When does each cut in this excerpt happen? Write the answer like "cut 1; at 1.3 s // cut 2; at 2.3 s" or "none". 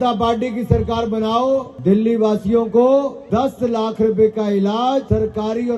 cut 1; at 1.7 s // cut 2; at 3.2 s // cut 3; at 5.0 s